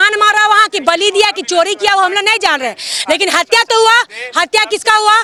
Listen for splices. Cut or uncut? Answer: uncut